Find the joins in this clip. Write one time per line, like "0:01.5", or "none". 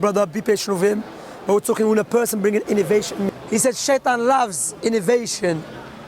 0:03.3